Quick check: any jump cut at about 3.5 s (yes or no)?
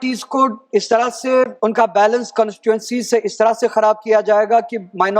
no